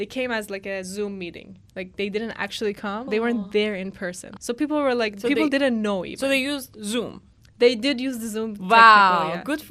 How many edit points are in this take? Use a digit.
2